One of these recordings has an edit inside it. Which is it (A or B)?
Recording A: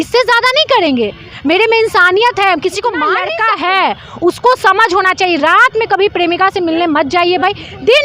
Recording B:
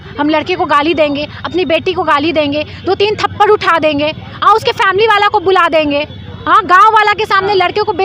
A